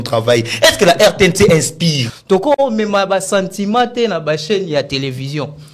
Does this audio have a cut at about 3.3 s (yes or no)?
no